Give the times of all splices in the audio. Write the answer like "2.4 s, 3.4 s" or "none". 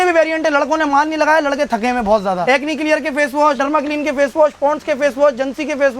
2.4 s, 3.6 s